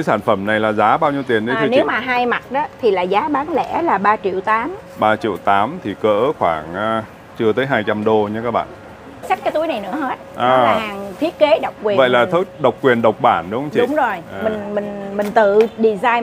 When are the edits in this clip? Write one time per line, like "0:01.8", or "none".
0:09.3